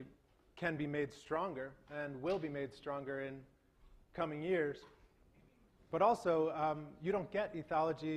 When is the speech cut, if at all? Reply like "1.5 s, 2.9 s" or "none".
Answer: none